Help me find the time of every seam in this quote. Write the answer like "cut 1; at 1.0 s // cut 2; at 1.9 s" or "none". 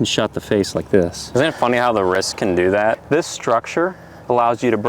cut 1; at 1.2 s // cut 2; at 3.0 s